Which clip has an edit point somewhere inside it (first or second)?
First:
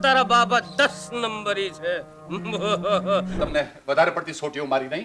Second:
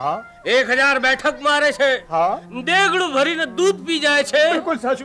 first